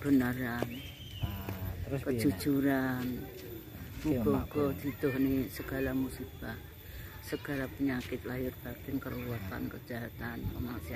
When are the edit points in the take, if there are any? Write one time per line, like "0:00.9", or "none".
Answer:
none